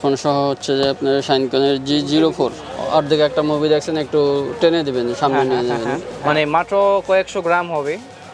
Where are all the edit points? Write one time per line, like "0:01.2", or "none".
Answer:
0:02.6
0:06.1